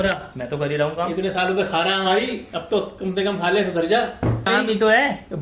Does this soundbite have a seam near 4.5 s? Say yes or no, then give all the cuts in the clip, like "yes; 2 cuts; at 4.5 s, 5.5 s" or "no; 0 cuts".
yes; 1 cut; at 4.5 s